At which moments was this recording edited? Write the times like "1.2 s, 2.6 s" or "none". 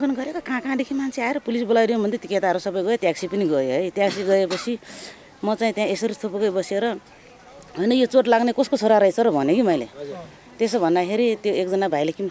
none